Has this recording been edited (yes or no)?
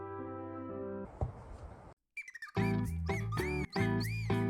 yes